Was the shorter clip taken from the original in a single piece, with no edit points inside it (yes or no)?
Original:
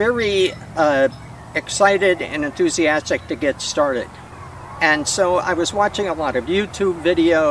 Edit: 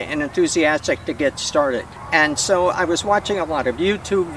no